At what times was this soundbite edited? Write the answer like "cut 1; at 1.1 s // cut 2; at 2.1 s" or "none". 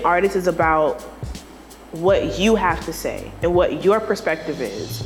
none